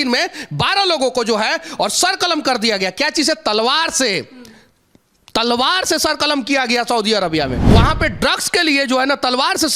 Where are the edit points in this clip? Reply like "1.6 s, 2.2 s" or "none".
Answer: 7.7 s

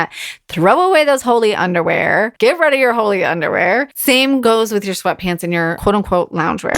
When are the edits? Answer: 2.3 s, 4.4 s, 5.8 s

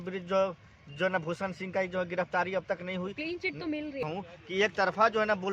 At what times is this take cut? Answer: 4.1 s

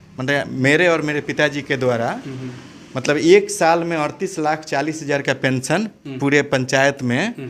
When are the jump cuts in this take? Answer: none

